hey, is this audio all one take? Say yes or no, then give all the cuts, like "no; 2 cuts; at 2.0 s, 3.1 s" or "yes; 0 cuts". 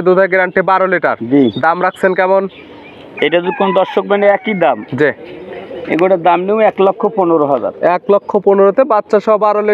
yes; 0 cuts